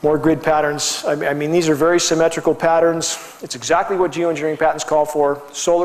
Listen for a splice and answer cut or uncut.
uncut